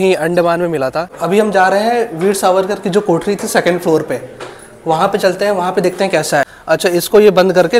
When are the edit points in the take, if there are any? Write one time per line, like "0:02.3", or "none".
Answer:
0:01.1
0:06.5

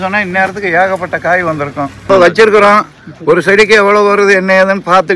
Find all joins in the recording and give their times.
0:02.1

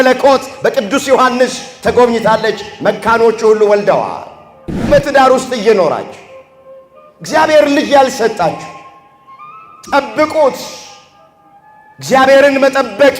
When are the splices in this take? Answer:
0:04.8

